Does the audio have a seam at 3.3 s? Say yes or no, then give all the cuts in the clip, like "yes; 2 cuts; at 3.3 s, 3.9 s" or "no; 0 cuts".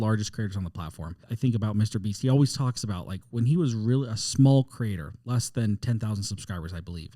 no; 1 cut; at 1.2 s